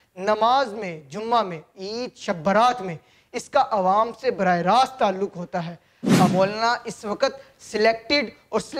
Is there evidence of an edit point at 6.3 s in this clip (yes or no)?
yes